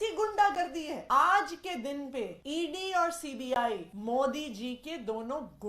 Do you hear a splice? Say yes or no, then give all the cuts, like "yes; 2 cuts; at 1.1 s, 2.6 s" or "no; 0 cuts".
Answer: yes; 3 cuts; at 1.0 s, 2.4 s, 3.9 s